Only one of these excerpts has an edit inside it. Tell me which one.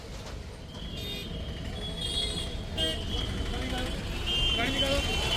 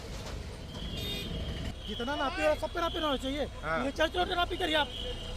second; 1 cut; at 1.7 s

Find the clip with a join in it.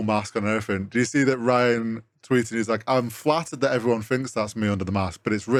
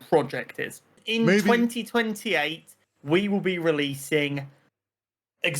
second; 1 cut; at 1.0 s

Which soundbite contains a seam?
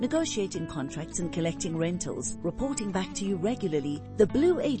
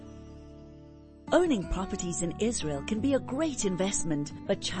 second; 1 cut; at 1.2 s

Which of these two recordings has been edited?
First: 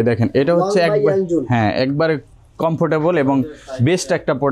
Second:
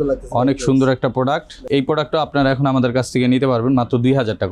second; 1 cut; at 1.6 s

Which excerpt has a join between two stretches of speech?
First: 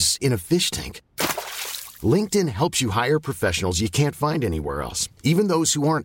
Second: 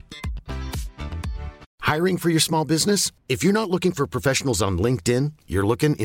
second; 1 cut; at 1.6 s

